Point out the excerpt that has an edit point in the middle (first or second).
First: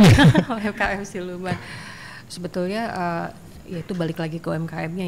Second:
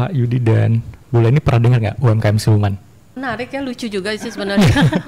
second